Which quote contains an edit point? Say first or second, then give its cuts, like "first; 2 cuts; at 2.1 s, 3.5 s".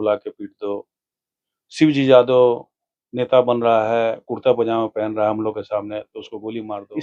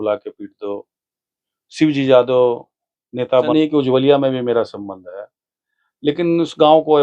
second; 1 cut; at 3.5 s